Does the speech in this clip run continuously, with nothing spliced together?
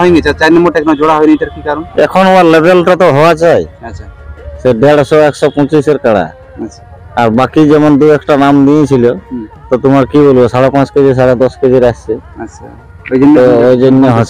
yes; 0 cuts

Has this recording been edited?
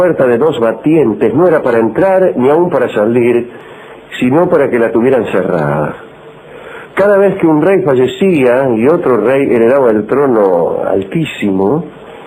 yes; 1 cut; at 5.8 s

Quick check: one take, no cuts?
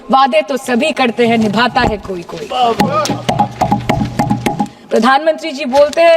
no; 1 cut; at 4.8 s

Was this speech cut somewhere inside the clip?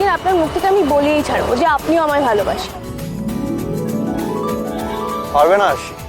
no; 0 cuts

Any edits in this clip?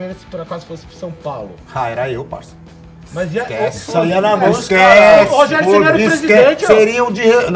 no; 0 cuts

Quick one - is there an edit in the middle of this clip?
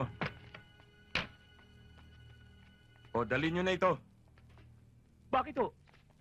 no; 0 cuts

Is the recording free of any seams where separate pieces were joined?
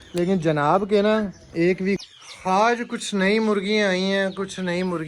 no; 1 cut; at 2.0 s

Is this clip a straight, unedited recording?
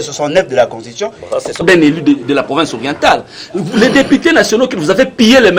no; 1 cut; at 1.6 s

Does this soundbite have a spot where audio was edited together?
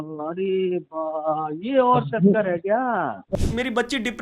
yes; 1 cut; at 3.2 s

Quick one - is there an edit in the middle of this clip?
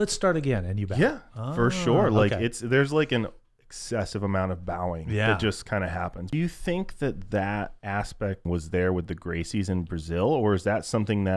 yes; 2 cuts; at 6.2 s, 8.4 s

